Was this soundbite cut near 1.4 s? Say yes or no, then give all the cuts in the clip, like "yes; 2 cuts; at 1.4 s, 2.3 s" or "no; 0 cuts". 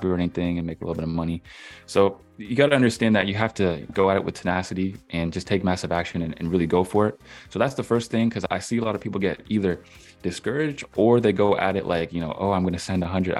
no; 0 cuts